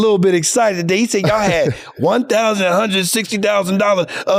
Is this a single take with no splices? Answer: yes; 0 cuts

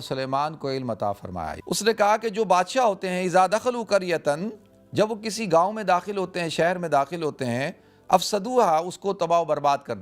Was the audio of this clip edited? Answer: yes; 1 cut; at 1.5 s

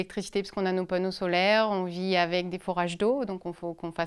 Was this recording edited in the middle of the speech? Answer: no; 0 cuts

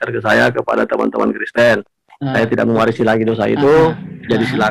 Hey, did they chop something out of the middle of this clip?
no; 0 cuts

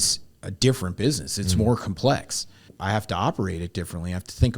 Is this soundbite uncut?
no; 1 cut; at 2.7 s

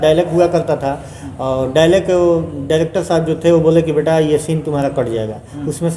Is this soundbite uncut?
yes; 0 cuts

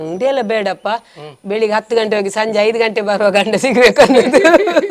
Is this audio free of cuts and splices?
yes; 0 cuts

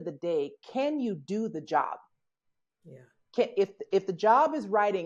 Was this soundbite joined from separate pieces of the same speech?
no; 0 cuts

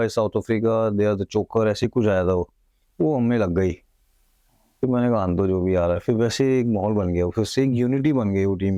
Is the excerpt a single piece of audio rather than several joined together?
yes; 0 cuts

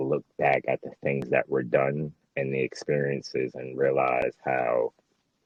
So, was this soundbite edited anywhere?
no; 0 cuts

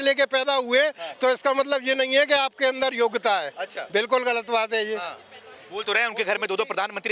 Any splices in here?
no; 0 cuts

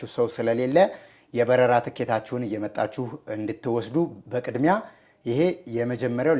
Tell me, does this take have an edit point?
no; 0 cuts

